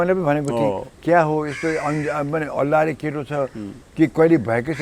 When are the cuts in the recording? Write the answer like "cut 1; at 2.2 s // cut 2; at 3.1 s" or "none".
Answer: none